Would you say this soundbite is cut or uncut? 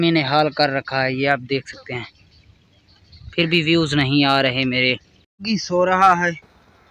uncut